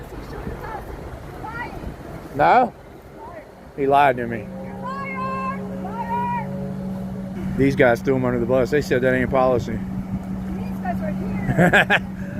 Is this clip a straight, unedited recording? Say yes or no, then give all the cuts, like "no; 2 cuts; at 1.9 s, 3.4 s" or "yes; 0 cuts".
no; 1 cut; at 7.4 s